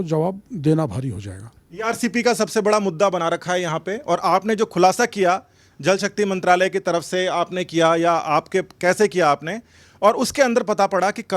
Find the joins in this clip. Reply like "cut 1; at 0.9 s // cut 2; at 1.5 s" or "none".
none